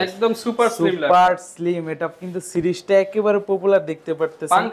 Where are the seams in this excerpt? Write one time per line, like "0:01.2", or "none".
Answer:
none